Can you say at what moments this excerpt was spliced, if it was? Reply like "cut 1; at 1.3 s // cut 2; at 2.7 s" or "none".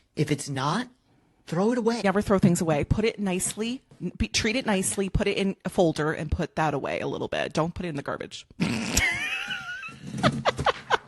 cut 1; at 2.0 s